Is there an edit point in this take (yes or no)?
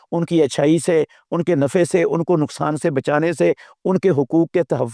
no